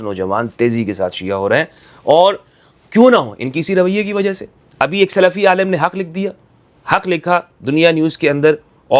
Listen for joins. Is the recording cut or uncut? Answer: uncut